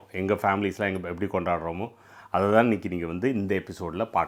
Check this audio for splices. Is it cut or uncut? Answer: uncut